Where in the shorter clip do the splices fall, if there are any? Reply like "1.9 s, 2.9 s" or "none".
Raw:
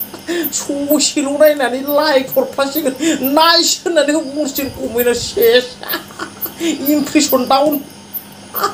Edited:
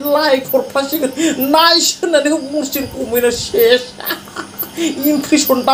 none

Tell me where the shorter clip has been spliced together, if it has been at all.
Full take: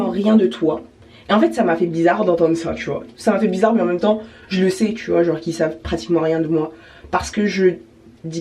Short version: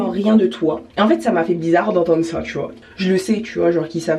0.9 s, 2.8 s

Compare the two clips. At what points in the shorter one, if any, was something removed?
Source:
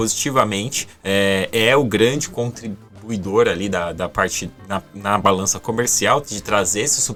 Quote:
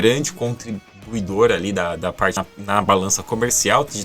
2.5 s

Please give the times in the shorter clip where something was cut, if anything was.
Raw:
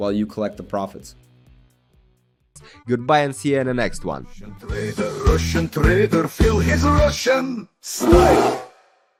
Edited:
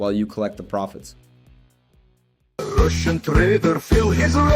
2.6 s

